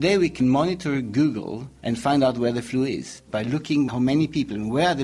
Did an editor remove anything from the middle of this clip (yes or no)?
yes